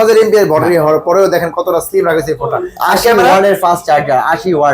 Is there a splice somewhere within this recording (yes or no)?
no